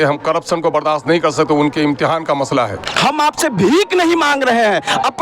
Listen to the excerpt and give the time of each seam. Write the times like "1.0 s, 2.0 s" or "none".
2.9 s